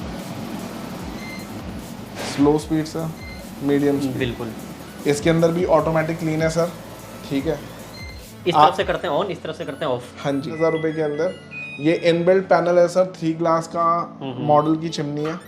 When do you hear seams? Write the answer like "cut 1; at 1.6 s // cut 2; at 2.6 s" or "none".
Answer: cut 1; at 10.5 s